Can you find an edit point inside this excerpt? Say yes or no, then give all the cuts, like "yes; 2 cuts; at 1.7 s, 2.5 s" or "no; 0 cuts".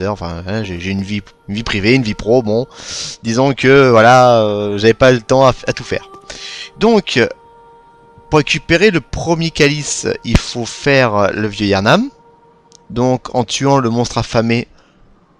yes; 1 cut; at 5.3 s